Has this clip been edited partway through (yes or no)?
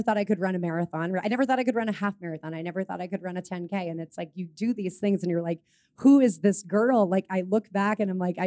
no